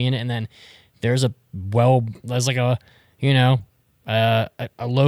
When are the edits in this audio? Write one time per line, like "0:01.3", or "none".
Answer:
none